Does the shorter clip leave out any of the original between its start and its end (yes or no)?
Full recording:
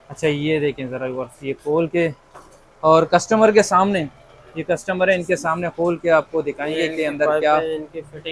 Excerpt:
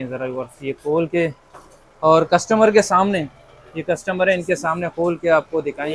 no